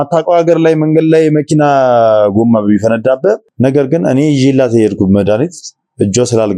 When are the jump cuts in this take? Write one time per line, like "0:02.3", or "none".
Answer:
0:03.5